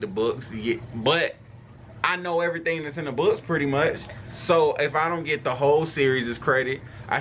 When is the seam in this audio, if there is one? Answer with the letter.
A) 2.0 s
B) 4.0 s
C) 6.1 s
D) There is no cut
D